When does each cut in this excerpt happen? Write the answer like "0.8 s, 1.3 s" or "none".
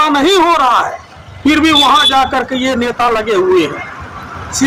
none